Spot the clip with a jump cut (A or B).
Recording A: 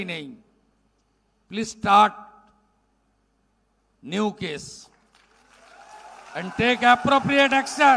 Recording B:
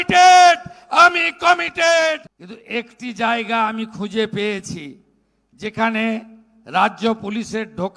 B